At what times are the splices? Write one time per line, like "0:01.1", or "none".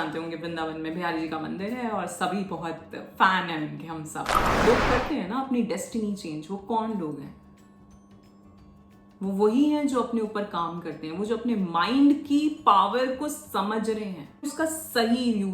0:04.4
0:14.5